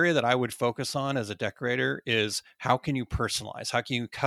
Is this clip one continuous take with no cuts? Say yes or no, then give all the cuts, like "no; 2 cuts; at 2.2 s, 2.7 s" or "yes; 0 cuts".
yes; 0 cuts